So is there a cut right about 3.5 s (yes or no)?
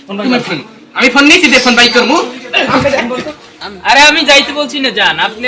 yes